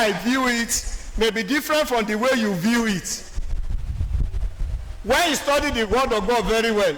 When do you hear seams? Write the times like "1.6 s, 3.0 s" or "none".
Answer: none